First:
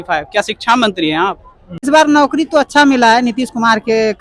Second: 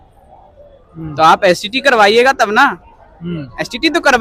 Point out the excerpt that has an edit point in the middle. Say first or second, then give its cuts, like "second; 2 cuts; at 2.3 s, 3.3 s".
first; 1 cut; at 1.5 s